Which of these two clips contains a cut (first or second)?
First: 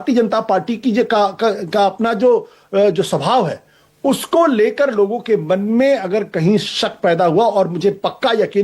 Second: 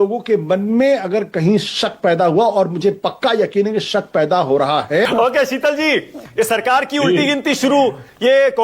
second